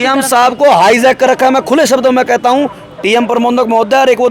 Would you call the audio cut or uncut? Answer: uncut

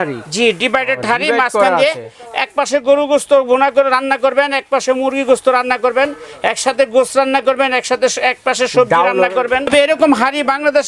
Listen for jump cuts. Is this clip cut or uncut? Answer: cut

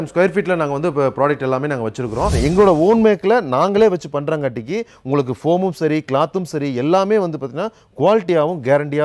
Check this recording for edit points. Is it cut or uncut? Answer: cut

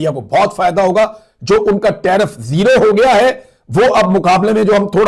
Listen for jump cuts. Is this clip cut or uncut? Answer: uncut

